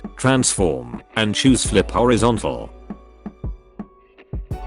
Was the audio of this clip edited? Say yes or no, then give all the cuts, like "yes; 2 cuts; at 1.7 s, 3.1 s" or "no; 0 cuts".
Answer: yes; 1 cut; at 2.6 s